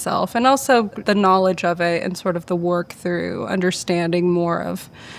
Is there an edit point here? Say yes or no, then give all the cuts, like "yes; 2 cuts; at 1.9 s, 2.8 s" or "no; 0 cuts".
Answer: yes; 1 cut; at 1.0 s